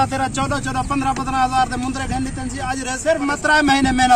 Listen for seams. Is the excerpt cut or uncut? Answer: cut